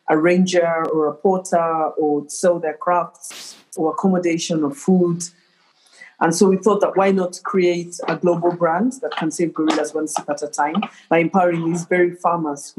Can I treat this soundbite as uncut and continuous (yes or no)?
no